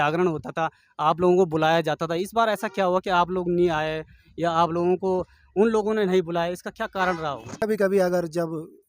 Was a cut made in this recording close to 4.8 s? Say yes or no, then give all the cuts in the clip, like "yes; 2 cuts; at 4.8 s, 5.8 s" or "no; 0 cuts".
no; 1 cut; at 7.8 s